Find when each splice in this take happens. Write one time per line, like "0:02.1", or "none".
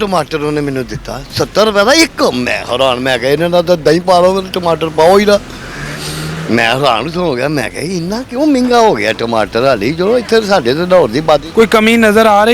none